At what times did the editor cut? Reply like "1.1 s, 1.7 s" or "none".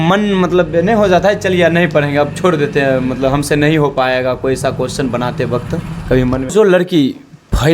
6.5 s

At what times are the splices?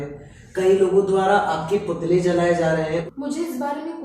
3.1 s

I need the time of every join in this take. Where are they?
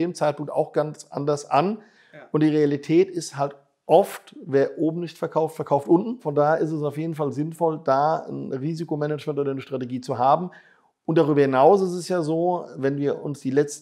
6.3 s

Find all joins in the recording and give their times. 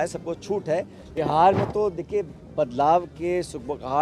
1.0 s

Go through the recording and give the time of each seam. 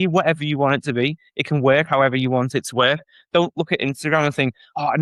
none

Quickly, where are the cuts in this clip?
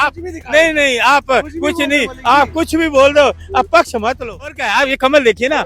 4.6 s

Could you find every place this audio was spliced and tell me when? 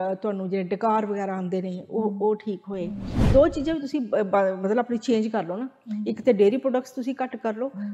3.3 s

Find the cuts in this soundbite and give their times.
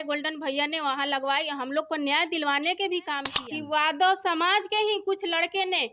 3.3 s

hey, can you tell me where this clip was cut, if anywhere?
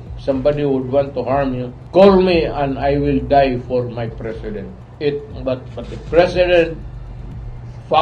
1.7 s, 4.8 s

